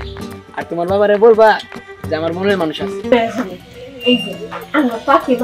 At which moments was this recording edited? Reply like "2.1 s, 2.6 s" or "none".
3.1 s

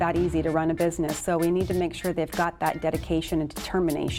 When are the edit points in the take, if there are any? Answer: none

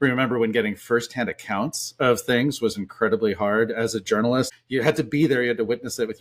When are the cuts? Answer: 4.5 s

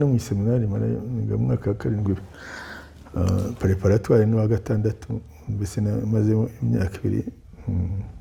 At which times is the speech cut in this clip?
none

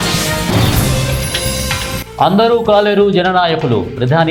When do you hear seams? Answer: none

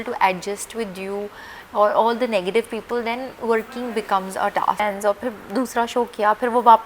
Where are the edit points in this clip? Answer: 4.8 s

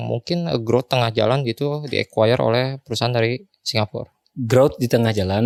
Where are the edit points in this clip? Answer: none

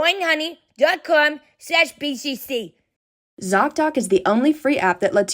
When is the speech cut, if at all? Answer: 3.0 s

